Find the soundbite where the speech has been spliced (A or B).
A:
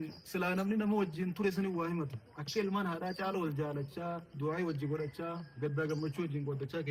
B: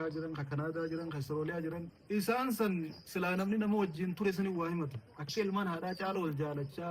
B